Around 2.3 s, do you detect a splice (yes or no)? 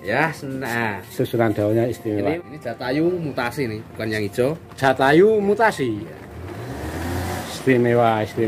yes